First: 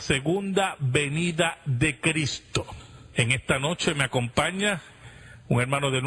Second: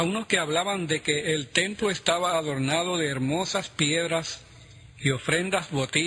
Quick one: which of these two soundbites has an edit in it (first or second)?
second